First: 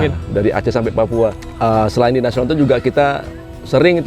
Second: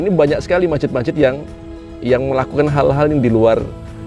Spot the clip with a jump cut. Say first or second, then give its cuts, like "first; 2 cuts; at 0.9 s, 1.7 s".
first; 1 cut; at 1.5 s